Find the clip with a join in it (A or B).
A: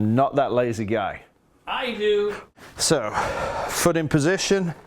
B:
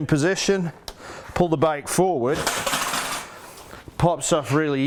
A